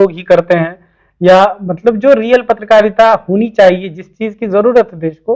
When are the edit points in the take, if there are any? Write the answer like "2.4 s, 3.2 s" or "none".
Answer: none